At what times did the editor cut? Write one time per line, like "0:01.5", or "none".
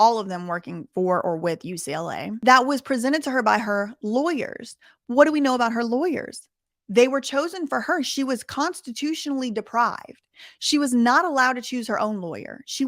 0:02.4